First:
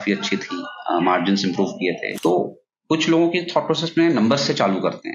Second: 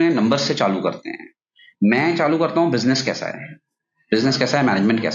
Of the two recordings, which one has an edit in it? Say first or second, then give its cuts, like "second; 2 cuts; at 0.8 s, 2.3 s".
first; 1 cut; at 2.1 s